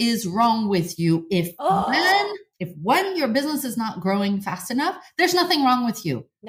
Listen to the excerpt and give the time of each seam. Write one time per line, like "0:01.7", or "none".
none

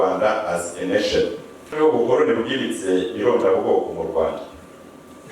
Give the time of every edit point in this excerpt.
0:01.8

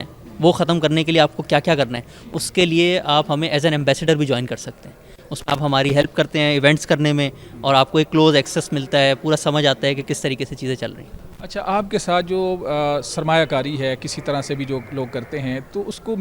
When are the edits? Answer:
none

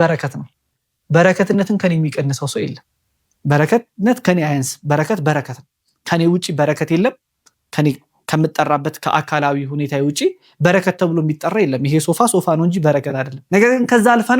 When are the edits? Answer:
0:13.3

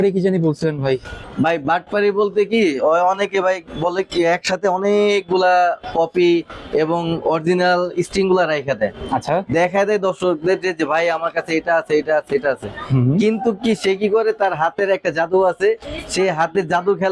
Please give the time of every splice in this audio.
0:01.2

